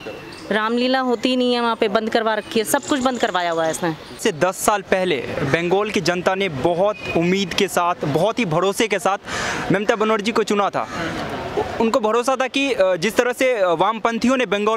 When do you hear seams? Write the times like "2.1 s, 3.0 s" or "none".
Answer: 4.2 s